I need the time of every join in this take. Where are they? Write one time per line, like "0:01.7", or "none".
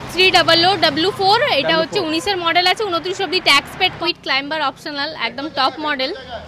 0:04.0